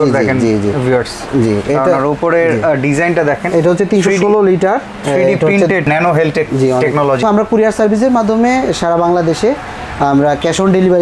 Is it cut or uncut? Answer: cut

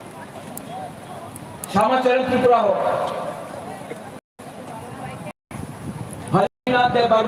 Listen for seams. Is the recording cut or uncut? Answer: uncut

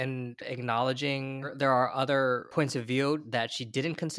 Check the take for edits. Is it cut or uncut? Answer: cut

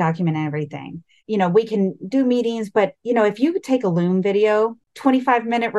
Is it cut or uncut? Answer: cut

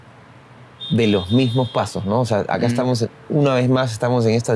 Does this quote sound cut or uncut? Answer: uncut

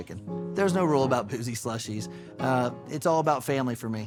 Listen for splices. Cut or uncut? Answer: uncut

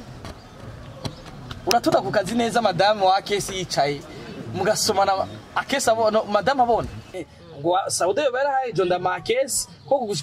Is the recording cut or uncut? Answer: cut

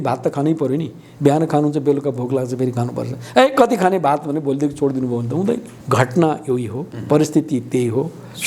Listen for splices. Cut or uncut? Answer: cut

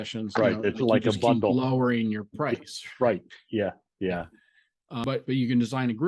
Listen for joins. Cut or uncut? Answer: cut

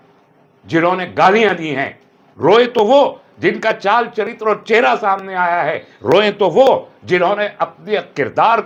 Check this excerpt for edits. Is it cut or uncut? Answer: uncut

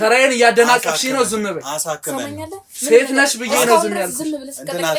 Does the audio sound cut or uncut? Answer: uncut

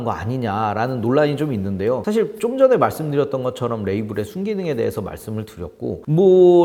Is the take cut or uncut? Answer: uncut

